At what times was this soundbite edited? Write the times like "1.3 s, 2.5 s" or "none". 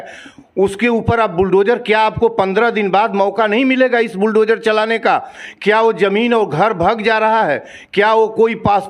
none